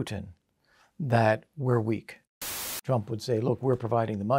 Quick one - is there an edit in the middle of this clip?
yes; 1 cut; at 2.7 s

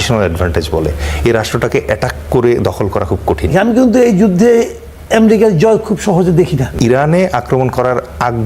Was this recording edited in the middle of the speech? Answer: yes; 2 cuts; at 3.5 s, 6.7 s

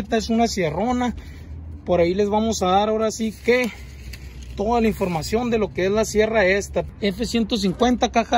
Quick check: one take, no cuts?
no; 1 cut; at 6.9 s

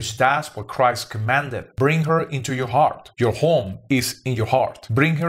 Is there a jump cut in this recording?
no; 0 cuts

